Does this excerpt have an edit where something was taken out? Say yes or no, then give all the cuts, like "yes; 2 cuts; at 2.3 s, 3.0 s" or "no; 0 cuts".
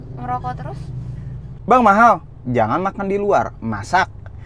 yes; 1 cut; at 1.4 s